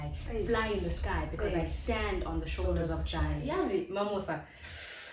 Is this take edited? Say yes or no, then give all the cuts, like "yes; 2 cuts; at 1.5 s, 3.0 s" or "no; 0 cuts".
yes; 1 cut; at 3.4 s